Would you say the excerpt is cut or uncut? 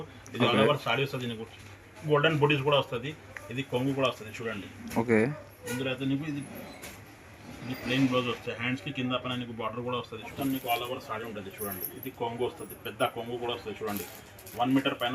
cut